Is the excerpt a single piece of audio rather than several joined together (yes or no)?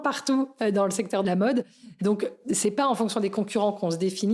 no